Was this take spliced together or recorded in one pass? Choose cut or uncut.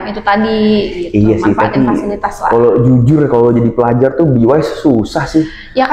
uncut